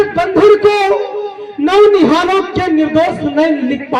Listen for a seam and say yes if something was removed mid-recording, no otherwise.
no